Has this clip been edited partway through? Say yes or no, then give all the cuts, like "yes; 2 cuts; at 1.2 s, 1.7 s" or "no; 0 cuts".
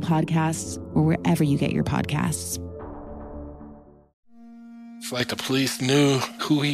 yes; 1 cut; at 4.0 s